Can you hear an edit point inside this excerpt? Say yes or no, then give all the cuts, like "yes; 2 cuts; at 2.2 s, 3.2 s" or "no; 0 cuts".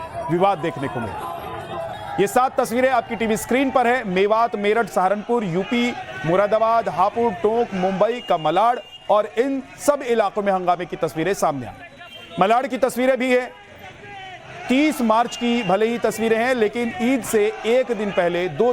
yes; 1 cut; at 7.3 s